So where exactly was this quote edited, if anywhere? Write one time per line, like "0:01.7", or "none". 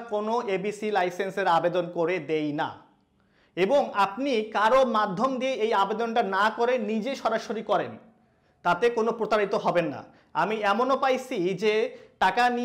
none